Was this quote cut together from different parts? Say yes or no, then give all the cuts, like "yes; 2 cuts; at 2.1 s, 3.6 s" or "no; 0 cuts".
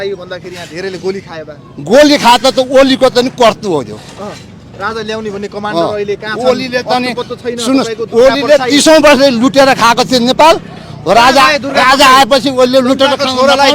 no; 0 cuts